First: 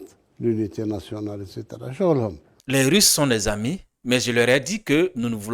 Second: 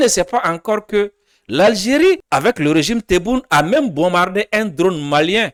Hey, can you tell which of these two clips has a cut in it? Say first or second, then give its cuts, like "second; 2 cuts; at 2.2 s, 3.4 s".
first; 1 cut; at 2.5 s